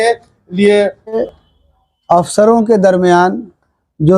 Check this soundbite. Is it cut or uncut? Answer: cut